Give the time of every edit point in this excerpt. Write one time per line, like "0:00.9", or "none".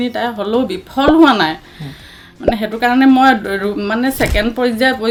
none